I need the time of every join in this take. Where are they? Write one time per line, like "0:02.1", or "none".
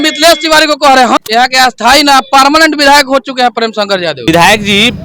0:01.2
0:04.2